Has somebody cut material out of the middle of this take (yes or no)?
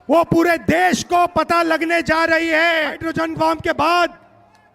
yes